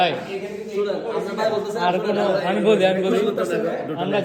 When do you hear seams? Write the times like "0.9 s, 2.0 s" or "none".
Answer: none